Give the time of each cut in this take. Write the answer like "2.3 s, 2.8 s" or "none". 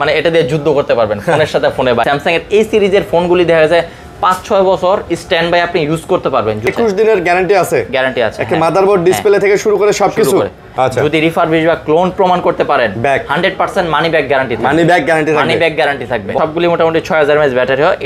2.0 s, 6.7 s, 10.7 s, 16.3 s